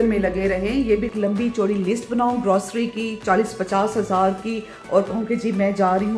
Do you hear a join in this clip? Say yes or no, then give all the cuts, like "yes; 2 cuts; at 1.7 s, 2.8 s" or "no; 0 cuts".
yes; 1 cut; at 1.1 s